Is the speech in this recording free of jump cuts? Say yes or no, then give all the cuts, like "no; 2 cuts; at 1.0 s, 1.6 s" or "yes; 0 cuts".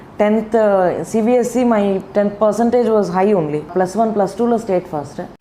no; 1 cut; at 3.7 s